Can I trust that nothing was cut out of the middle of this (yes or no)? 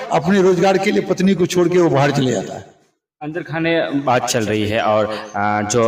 yes